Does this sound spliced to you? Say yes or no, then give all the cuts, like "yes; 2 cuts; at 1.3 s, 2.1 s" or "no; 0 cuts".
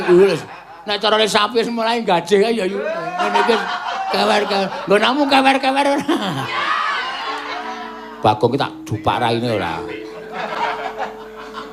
no; 0 cuts